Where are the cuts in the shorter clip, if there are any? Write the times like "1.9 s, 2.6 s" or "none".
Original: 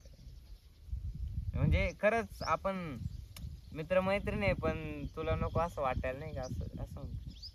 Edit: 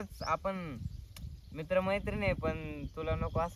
none